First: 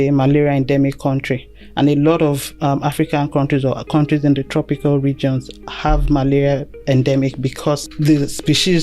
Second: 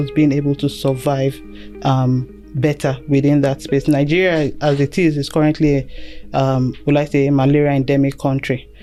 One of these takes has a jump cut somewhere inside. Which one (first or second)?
first